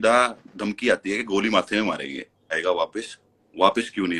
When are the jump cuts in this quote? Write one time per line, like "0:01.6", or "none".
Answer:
0:02.6

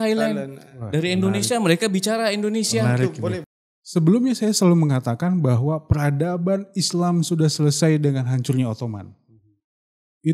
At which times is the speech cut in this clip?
0:03.5

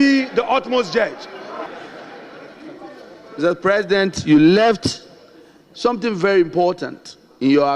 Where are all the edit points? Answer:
0:01.7

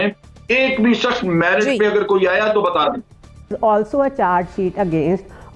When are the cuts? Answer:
0:03.5

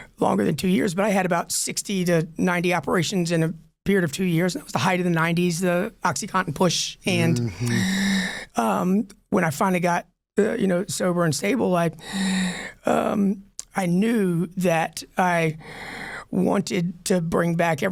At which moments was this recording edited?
none

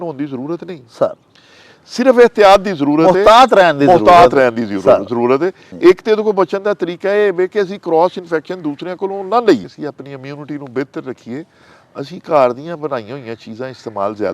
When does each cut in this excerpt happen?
0:05.7
0:09.6

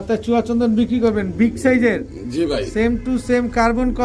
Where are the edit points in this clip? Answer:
none

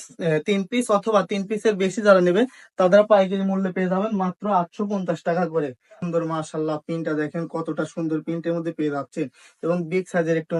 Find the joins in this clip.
0:06.0

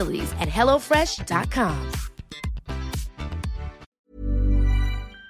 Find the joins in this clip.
0:04.0

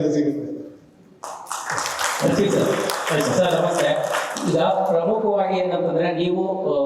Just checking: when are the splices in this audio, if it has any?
none

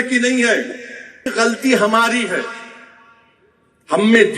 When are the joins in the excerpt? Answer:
0:01.3

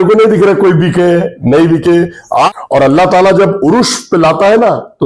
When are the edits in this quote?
0:02.5

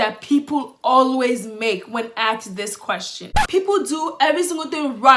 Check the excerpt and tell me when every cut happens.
0:03.3

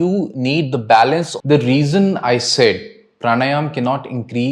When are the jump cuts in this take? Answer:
0:01.3

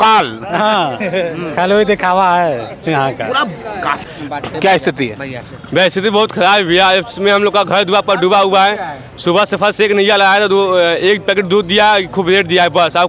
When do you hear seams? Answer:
0:04.0

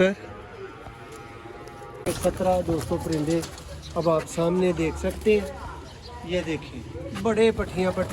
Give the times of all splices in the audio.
0:02.0

